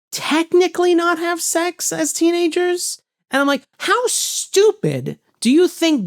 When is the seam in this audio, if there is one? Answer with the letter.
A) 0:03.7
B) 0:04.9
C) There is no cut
A